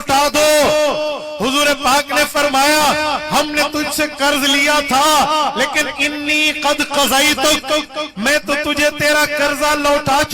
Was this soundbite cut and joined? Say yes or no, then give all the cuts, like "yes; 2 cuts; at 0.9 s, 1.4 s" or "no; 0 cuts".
no; 0 cuts